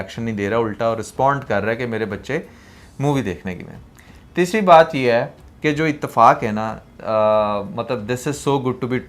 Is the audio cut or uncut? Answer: uncut